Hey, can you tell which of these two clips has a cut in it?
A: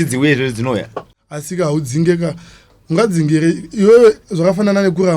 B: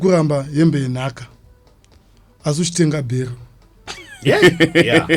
A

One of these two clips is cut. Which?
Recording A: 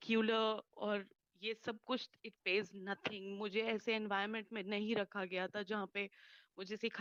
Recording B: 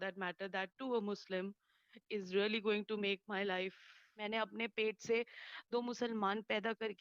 B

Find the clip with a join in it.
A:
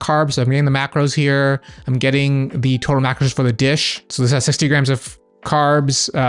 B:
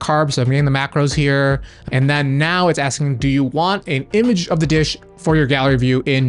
B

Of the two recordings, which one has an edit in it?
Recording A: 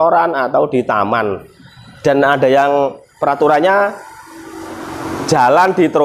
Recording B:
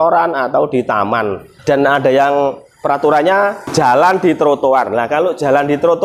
B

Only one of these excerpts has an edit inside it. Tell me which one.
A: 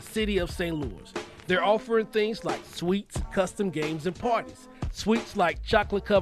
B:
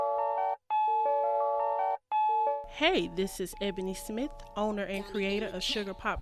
B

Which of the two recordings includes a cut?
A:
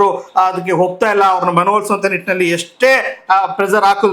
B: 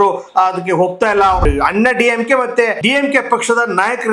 B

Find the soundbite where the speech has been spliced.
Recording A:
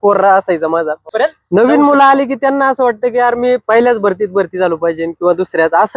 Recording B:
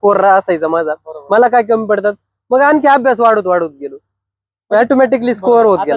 A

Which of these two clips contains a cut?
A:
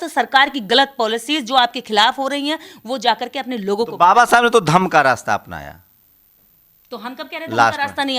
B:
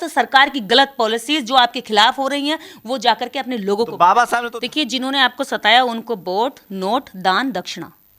B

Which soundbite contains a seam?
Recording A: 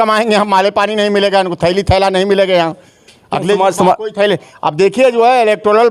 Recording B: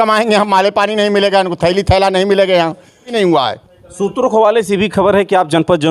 B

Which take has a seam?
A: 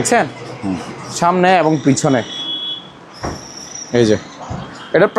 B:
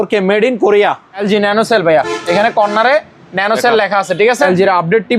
B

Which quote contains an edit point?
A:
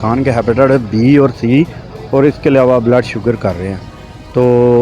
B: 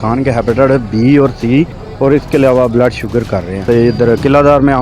B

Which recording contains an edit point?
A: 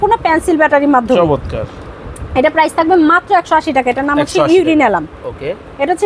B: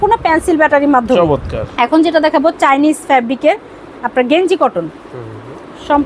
B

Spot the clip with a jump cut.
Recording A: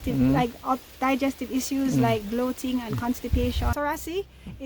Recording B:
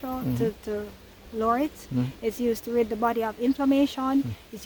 A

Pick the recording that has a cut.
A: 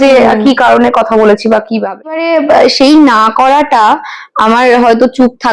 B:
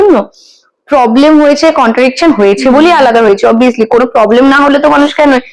A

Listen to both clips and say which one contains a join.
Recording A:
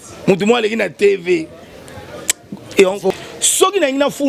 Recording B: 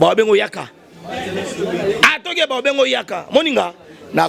A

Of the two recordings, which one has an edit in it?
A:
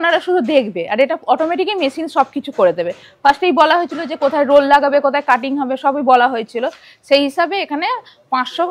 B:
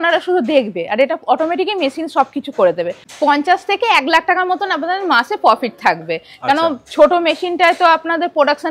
B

